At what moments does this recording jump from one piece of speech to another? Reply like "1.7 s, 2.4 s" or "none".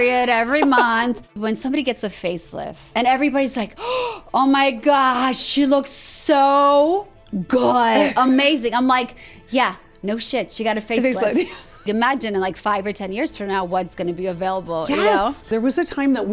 1.3 s, 2.8 s, 11.8 s, 15.4 s